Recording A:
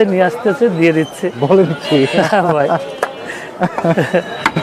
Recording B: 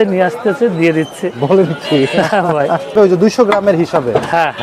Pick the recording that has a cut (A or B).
B